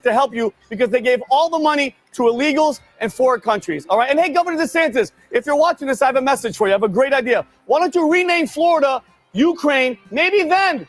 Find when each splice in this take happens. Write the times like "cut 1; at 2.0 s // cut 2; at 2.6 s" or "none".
cut 1; at 9.2 s